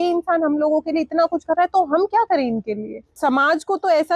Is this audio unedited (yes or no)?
no